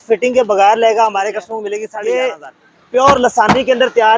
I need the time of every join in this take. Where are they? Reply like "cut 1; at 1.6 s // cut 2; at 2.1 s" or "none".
cut 1; at 1.6 s